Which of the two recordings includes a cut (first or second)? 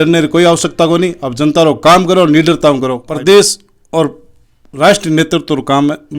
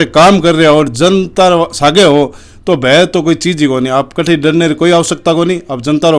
first